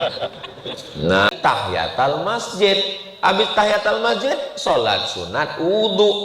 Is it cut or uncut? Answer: cut